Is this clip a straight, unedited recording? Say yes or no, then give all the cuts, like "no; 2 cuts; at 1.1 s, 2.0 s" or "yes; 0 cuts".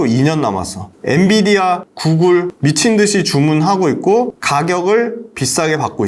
yes; 0 cuts